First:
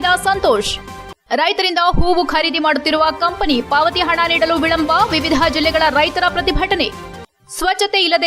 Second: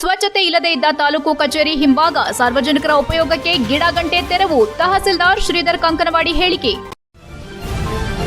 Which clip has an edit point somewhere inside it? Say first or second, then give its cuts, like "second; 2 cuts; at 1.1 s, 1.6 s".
second; 1 cut; at 6.9 s